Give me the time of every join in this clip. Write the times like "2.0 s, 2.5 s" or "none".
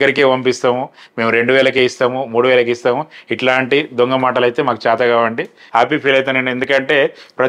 5.6 s